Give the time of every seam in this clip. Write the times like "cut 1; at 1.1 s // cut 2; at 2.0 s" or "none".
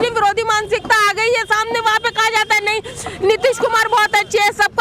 none